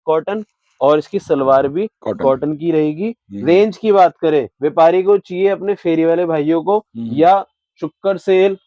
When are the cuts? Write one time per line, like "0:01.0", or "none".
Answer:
none